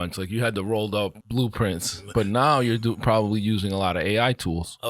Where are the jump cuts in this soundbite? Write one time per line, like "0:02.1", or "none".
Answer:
0:01.2